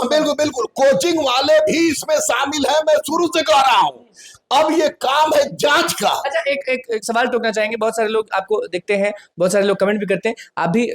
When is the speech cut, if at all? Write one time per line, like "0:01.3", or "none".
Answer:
none